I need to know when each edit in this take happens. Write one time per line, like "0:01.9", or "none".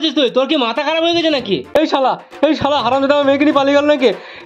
0:01.7